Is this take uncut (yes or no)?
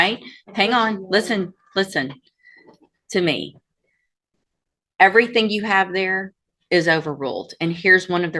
yes